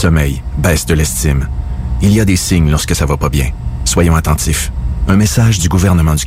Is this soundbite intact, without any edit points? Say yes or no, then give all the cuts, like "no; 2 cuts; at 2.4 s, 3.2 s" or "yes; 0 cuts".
yes; 0 cuts